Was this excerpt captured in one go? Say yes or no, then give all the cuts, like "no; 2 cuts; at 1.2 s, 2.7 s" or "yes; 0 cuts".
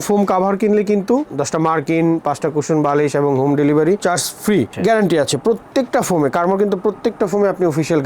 no; 2 cuts; at 1.3 s, 4.7 s